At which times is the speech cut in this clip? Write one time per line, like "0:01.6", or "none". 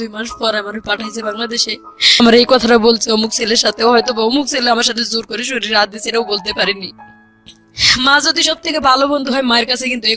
0:02.2